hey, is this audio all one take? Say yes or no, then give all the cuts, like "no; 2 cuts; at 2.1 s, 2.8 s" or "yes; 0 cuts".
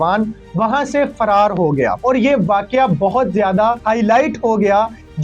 no; 2 cuts; at 2.0 s, 3.8 s